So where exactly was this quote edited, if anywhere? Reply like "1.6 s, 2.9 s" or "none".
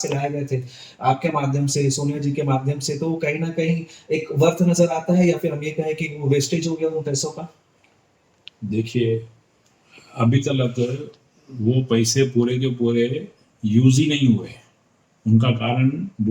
none

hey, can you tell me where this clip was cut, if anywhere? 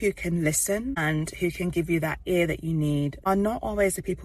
1.0 s, 3.2 s

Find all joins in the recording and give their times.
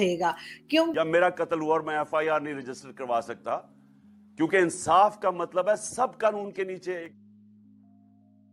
none

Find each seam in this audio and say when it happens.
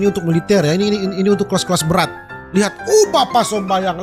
none

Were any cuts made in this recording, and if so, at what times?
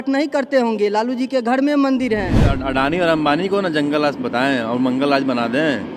2.5 s

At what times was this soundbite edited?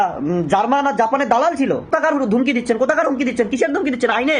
1.9 s

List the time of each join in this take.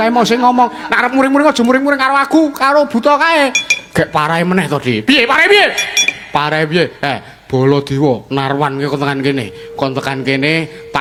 none

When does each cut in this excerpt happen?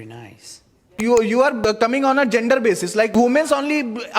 1.0 s, 1.6 s, 3.1 s

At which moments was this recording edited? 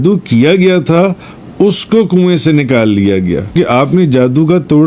3.5 s

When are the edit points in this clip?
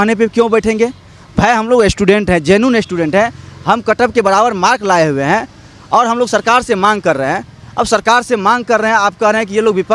none

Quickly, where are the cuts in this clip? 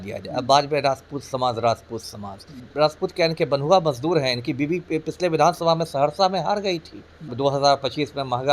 2.7 s, 7.3 s

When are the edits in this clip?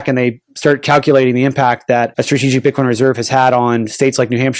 2.2 s

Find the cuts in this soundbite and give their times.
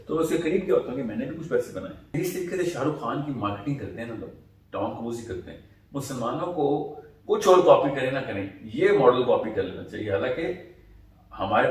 2.2 s

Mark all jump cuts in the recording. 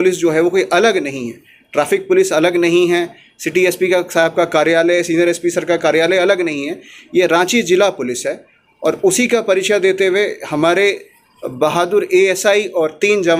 none

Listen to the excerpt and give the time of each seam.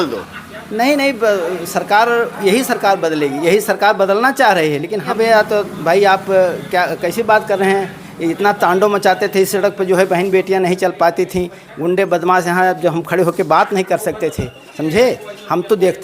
5.1 s

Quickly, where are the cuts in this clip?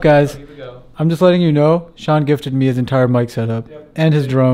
none

